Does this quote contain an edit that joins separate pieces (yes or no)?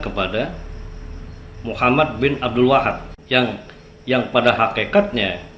yes